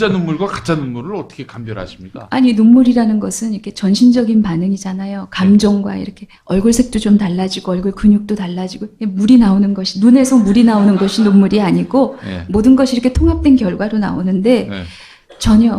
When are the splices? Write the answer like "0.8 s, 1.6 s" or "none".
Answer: 11.2 s